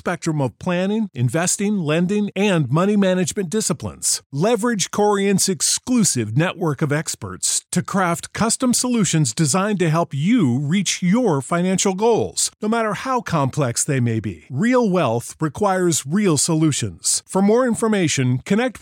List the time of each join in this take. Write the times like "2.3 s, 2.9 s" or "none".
none